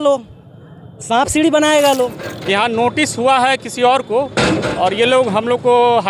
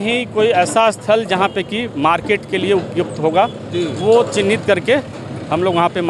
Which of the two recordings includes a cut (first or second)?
first